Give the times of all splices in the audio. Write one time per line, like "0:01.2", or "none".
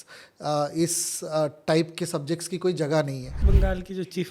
0:03.4